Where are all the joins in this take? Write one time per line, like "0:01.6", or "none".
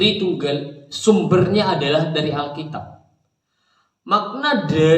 none